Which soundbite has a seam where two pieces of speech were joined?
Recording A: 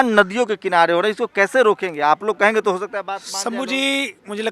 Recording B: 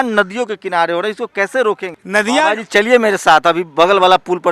B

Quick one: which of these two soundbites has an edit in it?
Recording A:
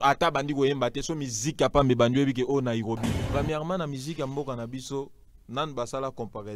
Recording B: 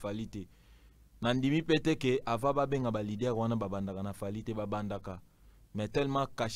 A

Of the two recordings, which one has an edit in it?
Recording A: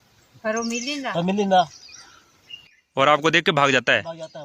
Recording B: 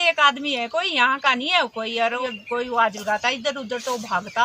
B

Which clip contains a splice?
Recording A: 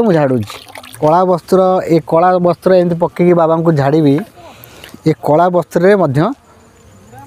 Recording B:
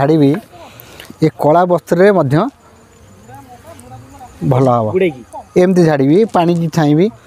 A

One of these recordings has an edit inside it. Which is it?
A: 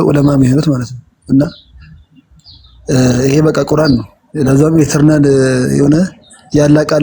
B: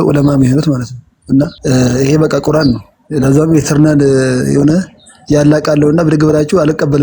B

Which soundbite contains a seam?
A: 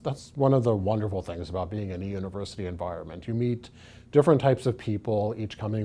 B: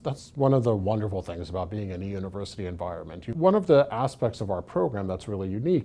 B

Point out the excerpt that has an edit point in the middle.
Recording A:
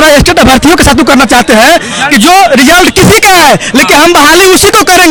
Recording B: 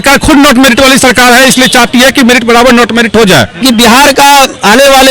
B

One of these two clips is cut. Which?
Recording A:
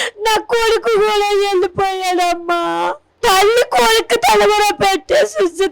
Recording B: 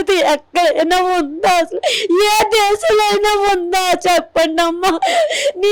A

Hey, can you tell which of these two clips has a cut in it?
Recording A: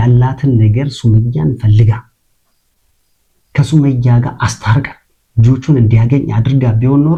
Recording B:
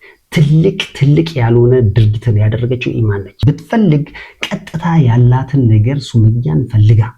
B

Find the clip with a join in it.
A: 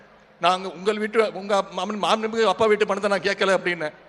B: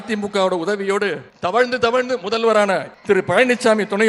B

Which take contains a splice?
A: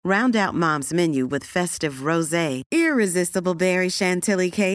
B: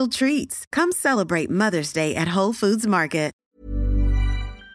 B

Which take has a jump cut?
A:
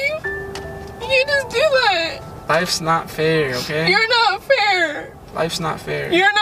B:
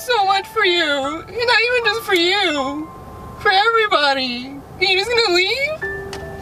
A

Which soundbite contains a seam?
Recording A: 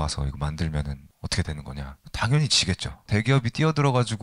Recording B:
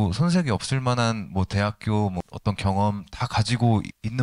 A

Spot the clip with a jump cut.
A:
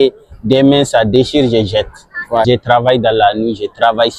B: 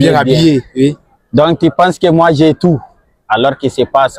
A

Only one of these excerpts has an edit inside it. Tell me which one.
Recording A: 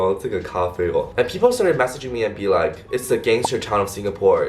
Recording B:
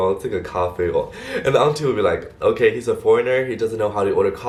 A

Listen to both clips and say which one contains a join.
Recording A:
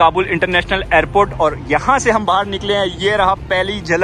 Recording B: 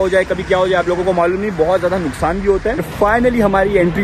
B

